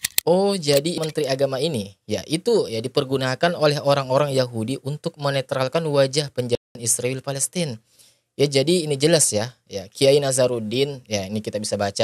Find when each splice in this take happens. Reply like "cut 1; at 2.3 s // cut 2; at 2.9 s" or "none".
cut 1; at 1.0 s